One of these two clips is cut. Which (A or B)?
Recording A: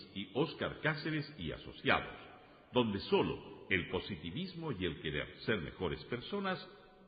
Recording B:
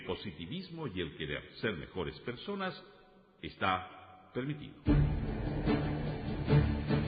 B